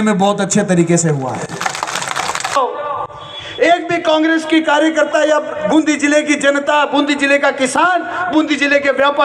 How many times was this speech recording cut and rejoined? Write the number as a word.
one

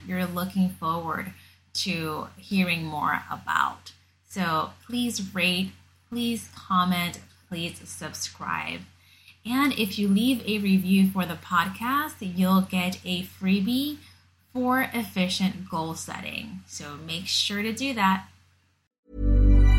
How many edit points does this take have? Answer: one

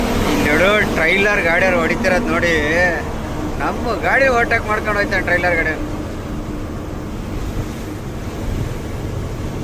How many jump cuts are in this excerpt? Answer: zero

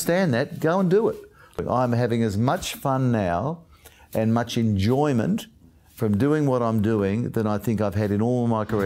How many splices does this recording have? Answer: one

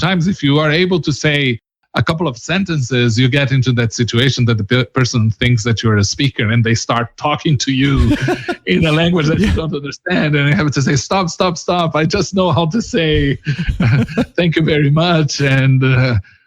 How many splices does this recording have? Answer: one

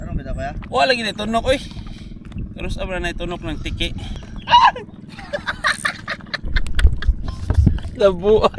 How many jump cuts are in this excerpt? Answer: one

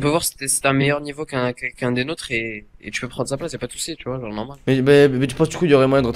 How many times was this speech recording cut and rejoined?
one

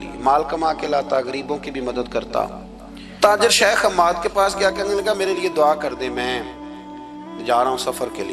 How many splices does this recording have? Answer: one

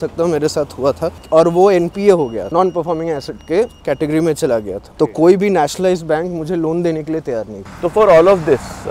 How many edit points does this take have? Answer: two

